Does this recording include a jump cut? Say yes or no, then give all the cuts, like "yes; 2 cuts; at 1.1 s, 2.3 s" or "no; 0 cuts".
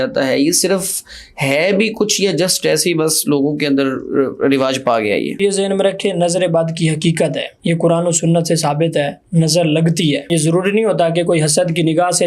yes; 3 cuts; at 5.4 s, 7.5 s, 10.3 s